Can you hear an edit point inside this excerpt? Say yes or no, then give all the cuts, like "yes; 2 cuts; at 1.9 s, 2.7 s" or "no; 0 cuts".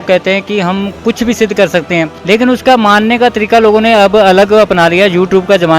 yes; 1 cut; at 2.1 s